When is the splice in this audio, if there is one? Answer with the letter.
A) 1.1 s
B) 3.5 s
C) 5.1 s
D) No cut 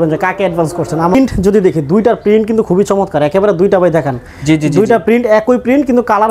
A